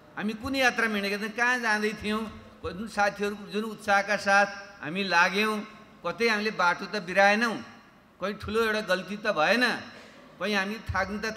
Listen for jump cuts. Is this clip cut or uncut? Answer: uncut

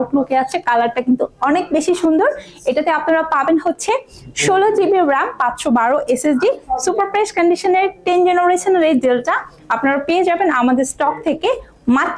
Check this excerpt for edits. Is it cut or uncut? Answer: uncut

